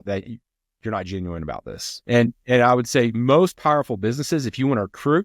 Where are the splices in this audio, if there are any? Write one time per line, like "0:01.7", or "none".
0:02.1